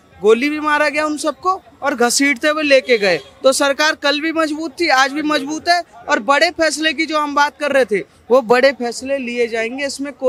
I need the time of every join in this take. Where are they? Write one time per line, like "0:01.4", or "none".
none